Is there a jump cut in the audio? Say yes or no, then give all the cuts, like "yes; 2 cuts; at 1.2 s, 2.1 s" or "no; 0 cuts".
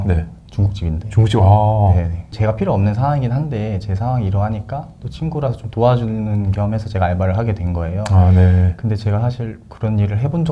yes; 1 cut; at 2.3 s